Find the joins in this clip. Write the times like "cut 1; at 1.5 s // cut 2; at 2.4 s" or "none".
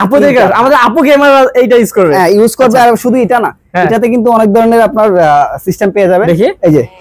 none